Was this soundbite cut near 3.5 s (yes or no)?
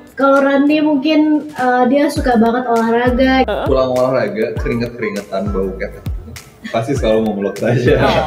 yes